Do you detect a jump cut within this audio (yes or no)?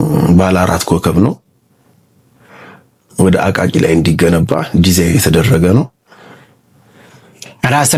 no